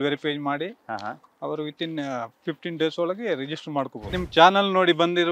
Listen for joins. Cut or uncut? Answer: cut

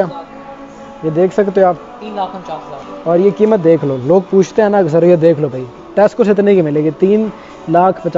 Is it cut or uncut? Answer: uncut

